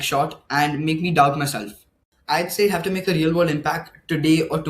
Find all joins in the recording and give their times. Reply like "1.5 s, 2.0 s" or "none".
2.1 s